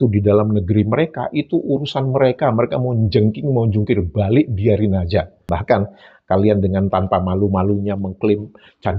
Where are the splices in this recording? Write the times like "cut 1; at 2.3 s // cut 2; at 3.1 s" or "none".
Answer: cut 1; at 5.5 s